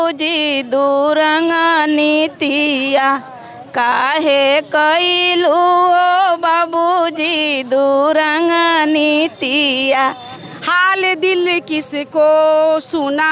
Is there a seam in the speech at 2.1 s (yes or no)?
no